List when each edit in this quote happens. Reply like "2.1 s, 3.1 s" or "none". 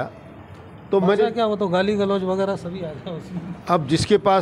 none